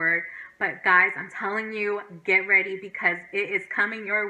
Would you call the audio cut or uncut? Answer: uncut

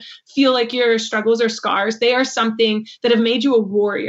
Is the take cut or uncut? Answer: uncut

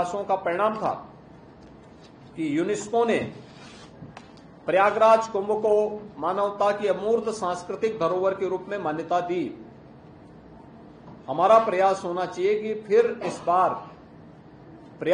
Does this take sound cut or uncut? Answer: uncut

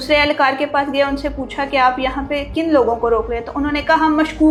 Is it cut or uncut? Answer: uncut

